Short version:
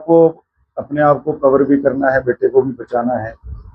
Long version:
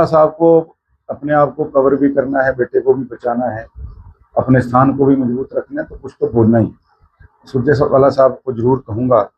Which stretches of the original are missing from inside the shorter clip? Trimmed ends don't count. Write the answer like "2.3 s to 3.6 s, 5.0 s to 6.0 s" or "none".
none